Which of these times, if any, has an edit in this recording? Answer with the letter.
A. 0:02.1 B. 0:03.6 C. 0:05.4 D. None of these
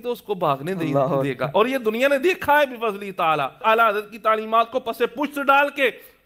B